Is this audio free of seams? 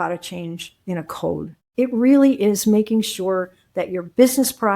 no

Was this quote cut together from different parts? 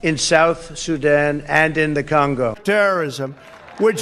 yes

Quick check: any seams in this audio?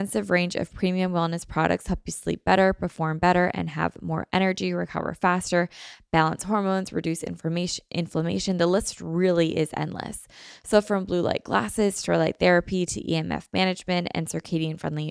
no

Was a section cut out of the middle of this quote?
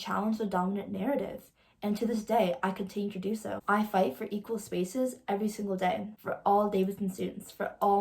yes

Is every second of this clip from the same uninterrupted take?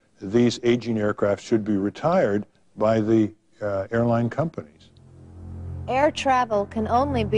no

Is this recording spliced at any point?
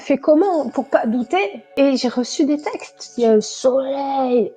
yes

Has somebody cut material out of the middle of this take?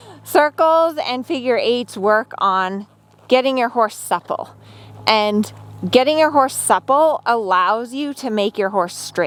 no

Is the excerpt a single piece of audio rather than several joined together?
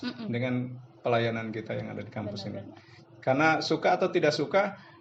yes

